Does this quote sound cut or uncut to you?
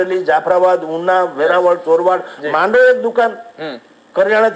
uncut